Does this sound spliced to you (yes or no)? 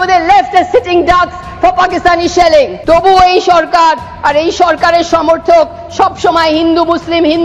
yes